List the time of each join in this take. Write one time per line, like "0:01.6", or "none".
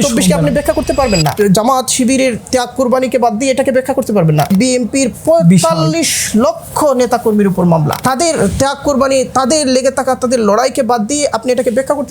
0:01.3
0:04.5
0:08.0